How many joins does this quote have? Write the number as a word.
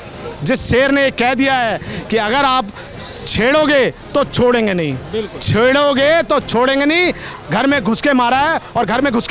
zero